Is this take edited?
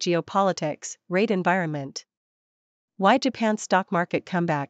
yes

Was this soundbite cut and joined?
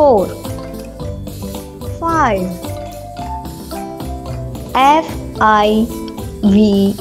yes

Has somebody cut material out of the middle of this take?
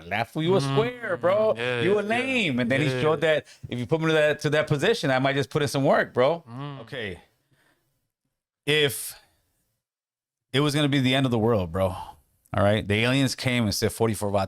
yes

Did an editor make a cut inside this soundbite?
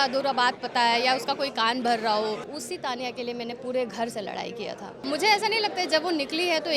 yes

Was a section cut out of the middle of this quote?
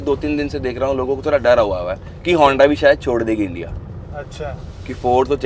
no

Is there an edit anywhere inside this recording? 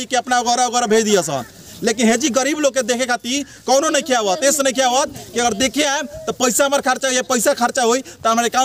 no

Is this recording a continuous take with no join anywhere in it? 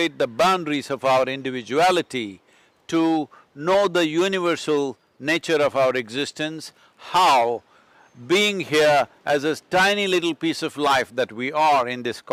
yes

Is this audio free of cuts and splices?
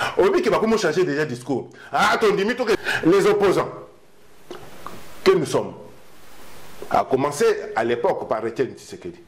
no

